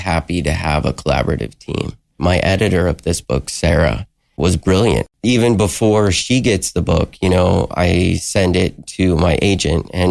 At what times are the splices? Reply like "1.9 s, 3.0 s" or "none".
2.1 s, 4.4 s, 5.1 s